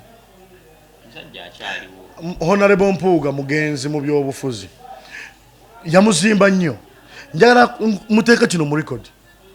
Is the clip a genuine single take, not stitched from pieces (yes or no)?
yes